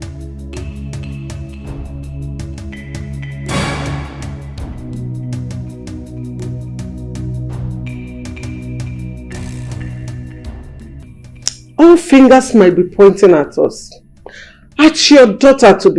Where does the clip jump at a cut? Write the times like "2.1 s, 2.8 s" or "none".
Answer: 11.0 s